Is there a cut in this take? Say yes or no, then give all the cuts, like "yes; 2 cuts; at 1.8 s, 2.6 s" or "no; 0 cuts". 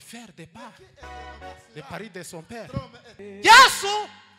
yes; 1 cut; at 3.1 s